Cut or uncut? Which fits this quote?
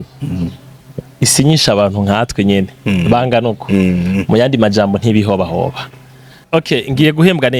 cut